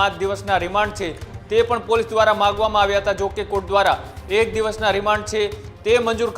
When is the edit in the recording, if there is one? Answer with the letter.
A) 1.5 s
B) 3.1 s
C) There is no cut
C